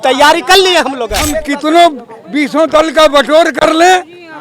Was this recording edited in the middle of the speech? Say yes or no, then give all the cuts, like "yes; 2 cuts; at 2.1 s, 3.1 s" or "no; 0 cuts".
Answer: yes; 1 cut; at 1.5 s